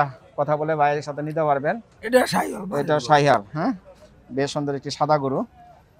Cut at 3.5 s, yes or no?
no